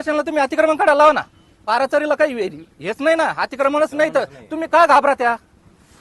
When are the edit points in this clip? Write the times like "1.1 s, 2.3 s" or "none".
1.6 s